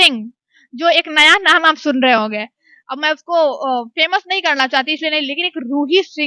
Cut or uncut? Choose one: uncut